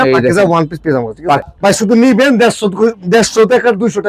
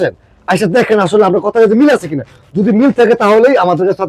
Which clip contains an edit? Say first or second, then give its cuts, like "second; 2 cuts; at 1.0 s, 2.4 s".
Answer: first; 1 cut; at 1.4 s